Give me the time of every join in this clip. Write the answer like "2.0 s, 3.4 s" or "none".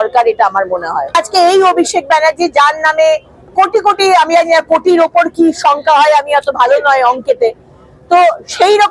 1.1 s

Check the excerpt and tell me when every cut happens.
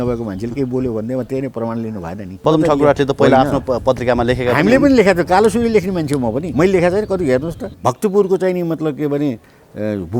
2.4 s, 6.4 s, 7.6 s

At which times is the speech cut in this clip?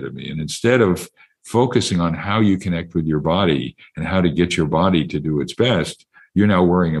none

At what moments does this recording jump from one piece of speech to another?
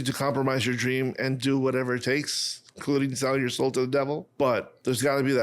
4.3 s

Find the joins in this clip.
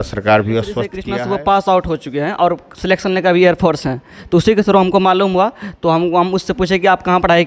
1.0 s

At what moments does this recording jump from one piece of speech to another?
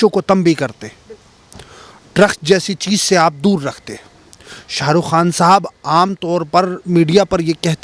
none

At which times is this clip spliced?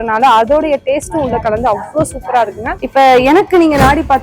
2.8 s

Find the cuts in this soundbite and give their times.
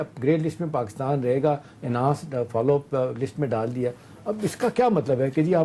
none

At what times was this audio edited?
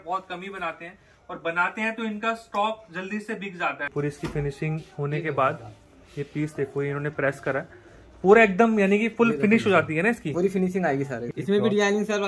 3.9 s, 11.2 s

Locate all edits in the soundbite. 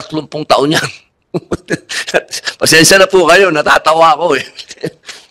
none

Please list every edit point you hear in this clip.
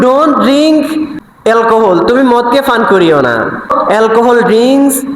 1.3 s, 3.8 s

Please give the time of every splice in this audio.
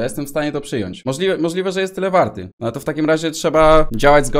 none

